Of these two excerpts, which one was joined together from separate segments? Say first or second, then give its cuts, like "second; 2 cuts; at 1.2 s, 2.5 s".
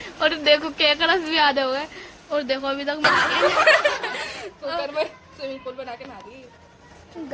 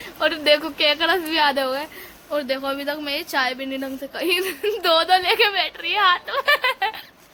first; 1 cut; at 3.0 s